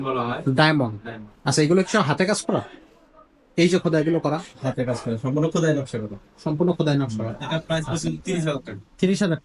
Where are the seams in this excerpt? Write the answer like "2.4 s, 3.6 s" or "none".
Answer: 7.4 s